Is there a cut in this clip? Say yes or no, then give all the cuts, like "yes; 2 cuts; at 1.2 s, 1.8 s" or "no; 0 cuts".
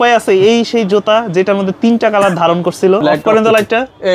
yes; 1 cut; at 3.0 s